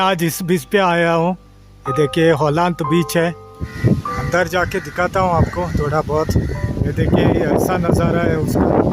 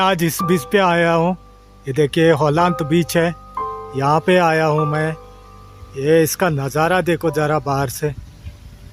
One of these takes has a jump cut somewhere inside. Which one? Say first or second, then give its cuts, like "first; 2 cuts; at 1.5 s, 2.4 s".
first; 2 cuts; at 3.7 s, 6.6 s